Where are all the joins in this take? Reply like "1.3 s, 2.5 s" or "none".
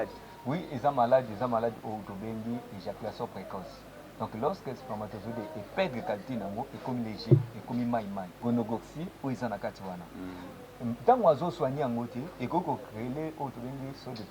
8.4 s